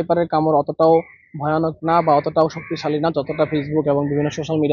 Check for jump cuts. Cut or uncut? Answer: uncut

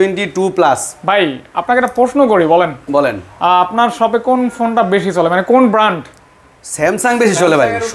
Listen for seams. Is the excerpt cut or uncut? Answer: uncut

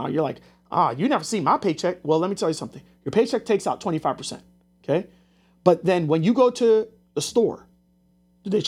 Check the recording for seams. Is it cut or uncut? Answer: uncut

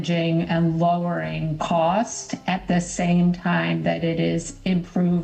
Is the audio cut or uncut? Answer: uncut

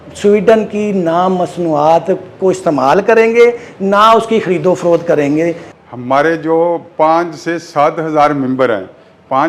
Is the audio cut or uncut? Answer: uncut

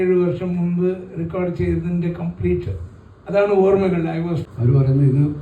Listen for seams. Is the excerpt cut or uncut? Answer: cut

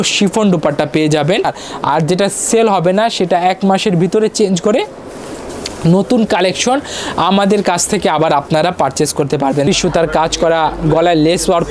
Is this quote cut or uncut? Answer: cut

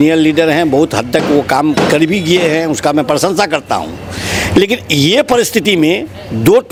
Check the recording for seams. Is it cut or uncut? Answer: uncut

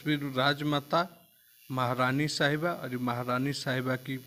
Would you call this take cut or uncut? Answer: uncut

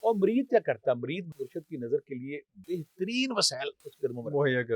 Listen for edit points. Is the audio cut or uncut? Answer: cut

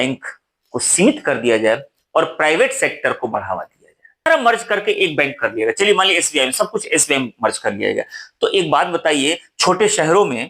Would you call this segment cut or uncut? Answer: cut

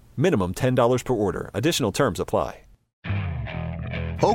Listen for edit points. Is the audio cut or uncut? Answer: cut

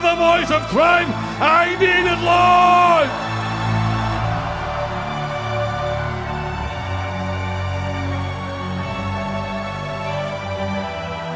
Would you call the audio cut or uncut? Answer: uncut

